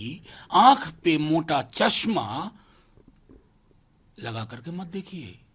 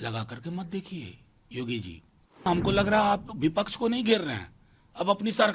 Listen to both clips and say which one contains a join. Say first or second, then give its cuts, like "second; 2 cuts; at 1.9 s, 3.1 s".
second; 1 cut; at 2.5 s